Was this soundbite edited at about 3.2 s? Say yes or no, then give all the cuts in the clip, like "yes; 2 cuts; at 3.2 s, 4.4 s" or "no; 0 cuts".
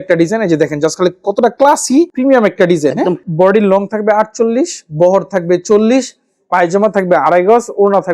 yes; 1 cut; at 3.2 s